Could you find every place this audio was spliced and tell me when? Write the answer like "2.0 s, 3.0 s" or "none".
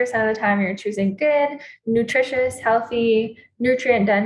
none